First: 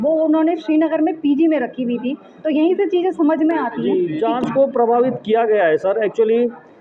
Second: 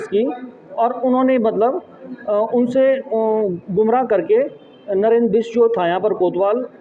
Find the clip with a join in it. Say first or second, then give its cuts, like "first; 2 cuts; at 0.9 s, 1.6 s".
first; 1 cut; at 3.7 s